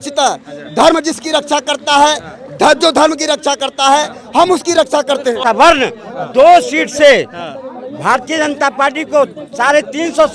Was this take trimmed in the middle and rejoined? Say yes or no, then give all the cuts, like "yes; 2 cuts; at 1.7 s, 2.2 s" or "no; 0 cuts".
yes; 1 cut; at 5.4 s